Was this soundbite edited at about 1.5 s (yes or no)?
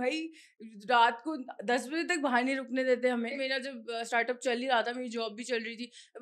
no